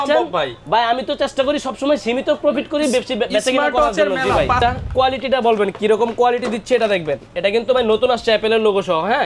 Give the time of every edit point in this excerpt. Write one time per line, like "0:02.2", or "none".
0:04.6